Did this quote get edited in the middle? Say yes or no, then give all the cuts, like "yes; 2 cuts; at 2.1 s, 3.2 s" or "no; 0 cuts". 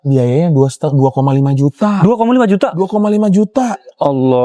no; 0 cuts